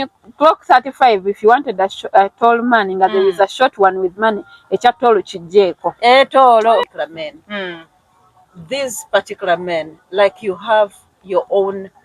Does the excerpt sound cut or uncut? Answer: cut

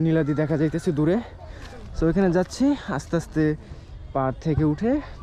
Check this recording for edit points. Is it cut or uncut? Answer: uncut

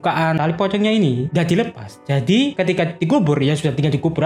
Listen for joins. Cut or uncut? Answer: uncut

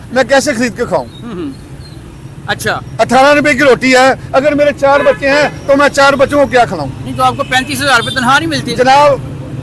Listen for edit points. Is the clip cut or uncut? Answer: uncut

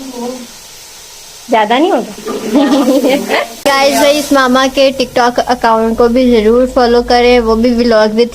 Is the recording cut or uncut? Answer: cut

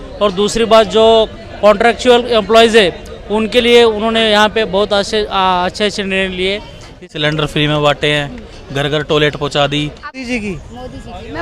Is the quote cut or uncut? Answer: cut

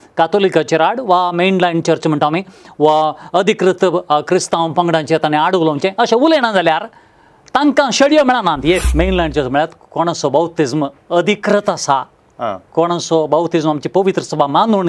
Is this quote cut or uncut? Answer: cut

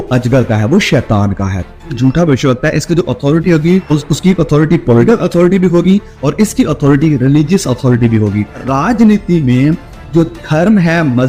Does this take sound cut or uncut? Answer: cut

